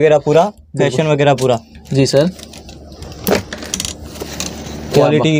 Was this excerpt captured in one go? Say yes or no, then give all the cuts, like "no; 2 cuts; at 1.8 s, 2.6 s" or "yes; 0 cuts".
yes; 0 cuts